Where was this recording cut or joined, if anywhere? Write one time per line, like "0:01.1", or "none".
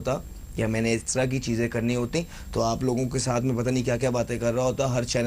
0:01.2